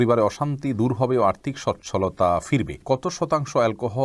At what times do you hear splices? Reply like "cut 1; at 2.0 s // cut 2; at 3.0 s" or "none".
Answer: cut 1; at 2.8 s

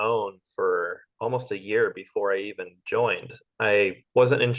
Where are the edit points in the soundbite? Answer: cut 1; at 3.5 s

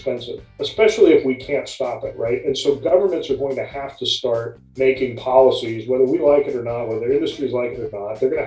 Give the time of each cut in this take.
cut 1; at 4.6 s

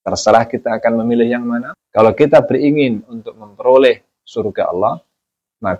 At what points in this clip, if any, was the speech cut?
cut 1; at 1.8 s

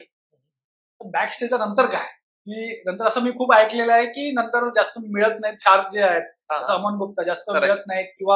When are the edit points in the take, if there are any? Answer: none

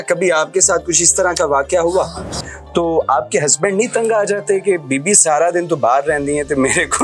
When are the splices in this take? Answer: cut 1; at 2.4 s

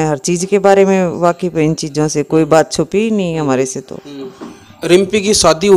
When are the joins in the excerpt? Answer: none

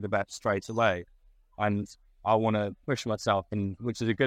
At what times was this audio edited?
none

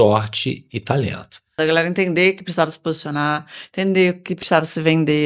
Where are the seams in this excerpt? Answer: cut 1; at 1.5 s

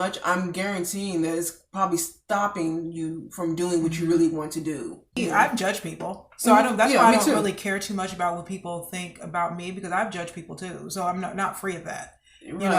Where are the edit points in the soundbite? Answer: cut 1; at 5.1 s

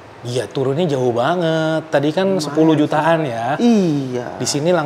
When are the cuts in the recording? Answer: none

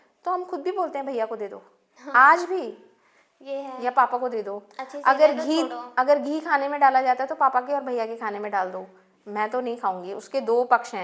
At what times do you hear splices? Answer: none

